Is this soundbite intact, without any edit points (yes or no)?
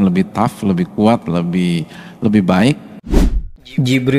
no